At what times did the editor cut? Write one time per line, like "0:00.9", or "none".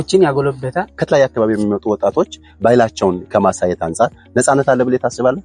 0:01.0